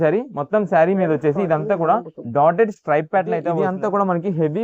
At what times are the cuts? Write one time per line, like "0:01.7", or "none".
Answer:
0:03.5